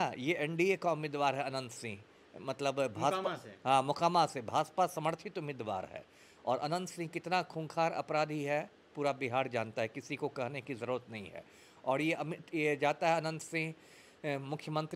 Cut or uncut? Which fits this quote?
uncut